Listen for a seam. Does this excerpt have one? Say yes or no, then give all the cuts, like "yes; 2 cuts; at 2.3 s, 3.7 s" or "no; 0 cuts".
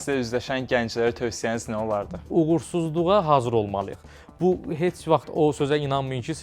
yes; 1 cut; at 2.3 s